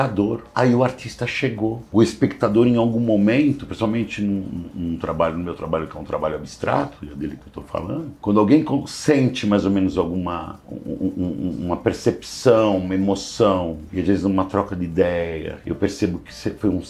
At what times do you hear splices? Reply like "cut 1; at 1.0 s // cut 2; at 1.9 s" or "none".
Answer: none